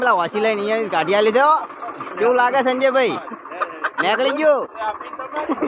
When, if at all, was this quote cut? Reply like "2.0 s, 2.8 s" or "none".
2.0 s, 4.7 s